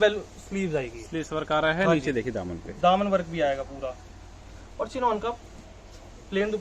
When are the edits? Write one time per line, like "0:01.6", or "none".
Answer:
none